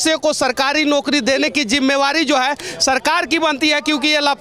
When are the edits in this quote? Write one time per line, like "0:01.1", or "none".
none